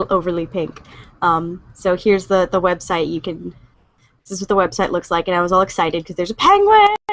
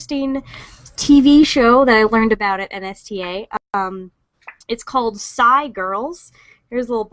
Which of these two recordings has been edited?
first; 1 cut; at 2.4 s

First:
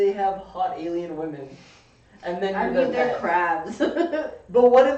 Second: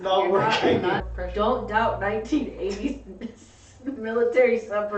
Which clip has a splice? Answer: second; 1 cut; at 1.0 s

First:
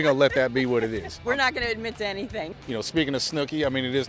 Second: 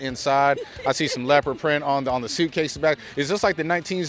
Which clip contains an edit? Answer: first; 2 cuts; at 1.1 s, 2.5 s

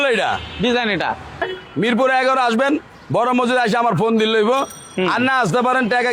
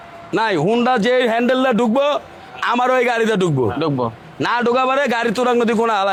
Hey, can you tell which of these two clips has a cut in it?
first; 1 cut; at 1.4 s

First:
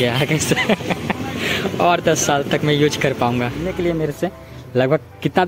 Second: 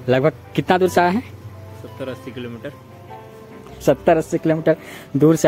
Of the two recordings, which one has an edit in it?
first; 1 cut; at 3.7 s

